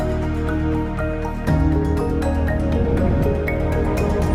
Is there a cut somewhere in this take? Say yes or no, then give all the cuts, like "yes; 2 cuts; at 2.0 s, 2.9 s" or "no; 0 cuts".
no; 0 cuts